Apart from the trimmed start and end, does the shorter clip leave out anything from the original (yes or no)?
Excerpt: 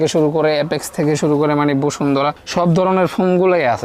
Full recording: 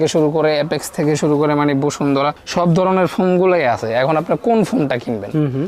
no